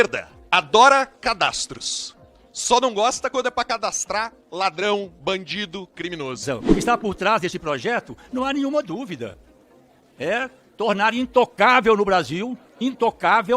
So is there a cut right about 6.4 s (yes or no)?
yes